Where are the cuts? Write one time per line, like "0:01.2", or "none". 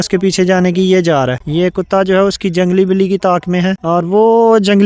none